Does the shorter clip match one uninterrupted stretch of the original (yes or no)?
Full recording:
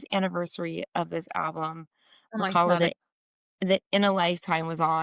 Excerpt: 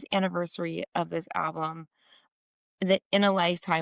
no